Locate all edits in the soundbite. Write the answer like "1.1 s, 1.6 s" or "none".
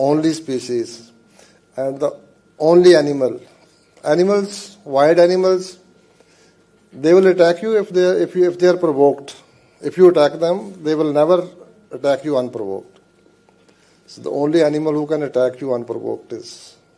none